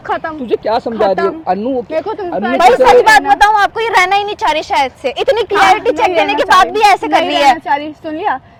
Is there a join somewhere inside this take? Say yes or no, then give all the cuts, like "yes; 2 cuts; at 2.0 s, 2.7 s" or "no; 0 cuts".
no; 0 cuts